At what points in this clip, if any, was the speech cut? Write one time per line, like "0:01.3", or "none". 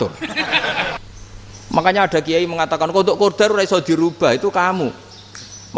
0:01.0